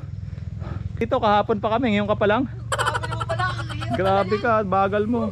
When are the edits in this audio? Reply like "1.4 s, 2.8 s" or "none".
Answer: 1.1 s